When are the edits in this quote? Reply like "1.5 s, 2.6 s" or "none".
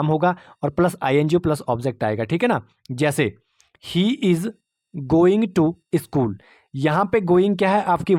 none